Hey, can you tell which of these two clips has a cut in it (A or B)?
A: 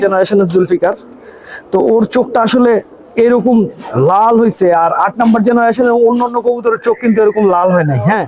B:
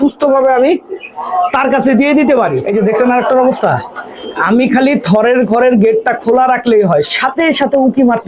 B